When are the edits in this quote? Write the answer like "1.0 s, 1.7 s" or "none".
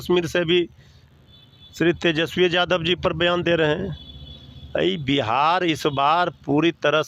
none